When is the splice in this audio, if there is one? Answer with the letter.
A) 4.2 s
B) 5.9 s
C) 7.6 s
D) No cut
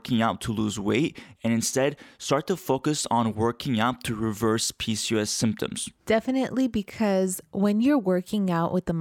B